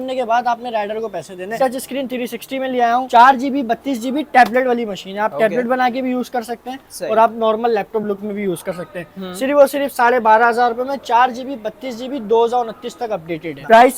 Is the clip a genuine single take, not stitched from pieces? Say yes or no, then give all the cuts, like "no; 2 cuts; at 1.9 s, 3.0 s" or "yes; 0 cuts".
yes; 0 cuts